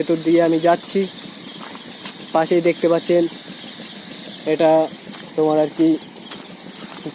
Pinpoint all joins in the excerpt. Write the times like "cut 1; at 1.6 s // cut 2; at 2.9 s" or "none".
none